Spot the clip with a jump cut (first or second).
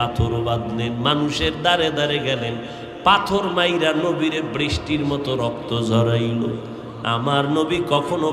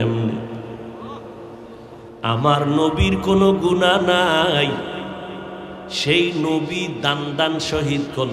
second